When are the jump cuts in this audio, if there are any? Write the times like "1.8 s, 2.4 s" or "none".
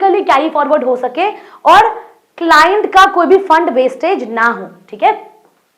none